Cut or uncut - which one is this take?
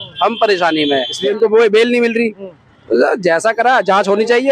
cut